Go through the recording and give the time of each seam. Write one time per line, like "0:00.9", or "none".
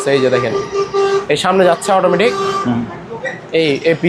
none